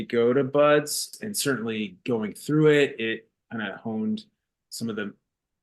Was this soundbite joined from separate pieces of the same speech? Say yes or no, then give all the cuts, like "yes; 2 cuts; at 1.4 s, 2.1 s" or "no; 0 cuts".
yes; 1 cut; at 1.1 s